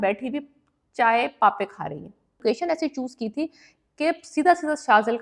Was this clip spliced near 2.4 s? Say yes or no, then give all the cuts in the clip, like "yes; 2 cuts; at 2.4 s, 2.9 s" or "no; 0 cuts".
yes; 1 cut; at 2.4 s